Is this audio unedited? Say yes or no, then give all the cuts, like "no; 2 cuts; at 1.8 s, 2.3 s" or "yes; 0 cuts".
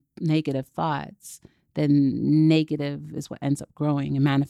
yes; 0 cuts